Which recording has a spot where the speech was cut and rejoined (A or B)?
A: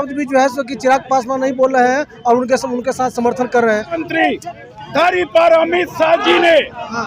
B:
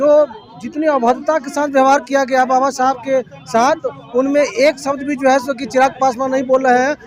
A